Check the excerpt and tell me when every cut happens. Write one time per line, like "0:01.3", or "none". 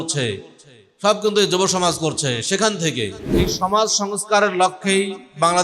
0:03.4